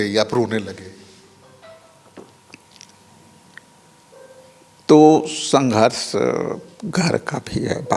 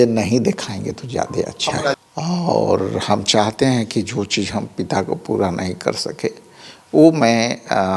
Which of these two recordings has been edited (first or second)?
second